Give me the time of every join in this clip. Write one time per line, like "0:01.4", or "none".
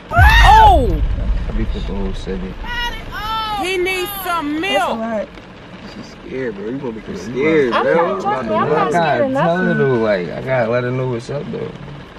none